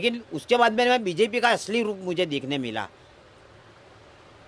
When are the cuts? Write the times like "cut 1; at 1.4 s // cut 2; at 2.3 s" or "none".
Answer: none